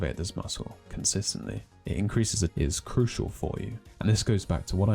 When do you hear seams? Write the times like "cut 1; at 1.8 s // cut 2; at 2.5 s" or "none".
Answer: cut 1; at 2.5 s